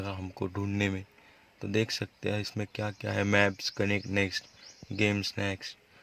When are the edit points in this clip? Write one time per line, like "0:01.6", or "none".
none